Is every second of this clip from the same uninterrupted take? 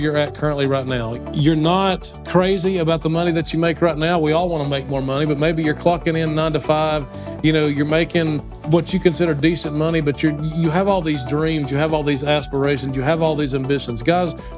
no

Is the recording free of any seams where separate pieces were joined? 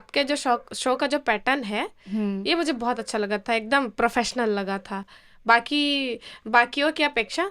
yes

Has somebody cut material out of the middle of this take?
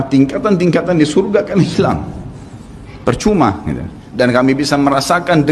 yes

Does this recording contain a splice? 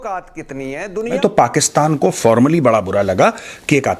yes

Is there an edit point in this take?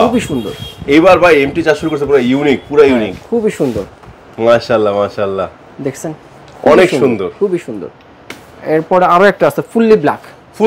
no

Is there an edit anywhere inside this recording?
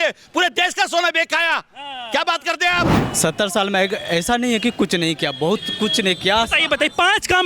yes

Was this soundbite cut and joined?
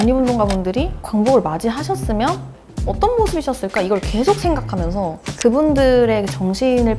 yes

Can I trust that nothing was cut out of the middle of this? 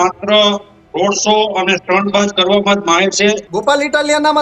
no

